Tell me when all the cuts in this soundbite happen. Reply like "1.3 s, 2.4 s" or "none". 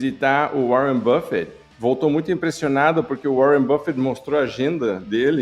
1.7 s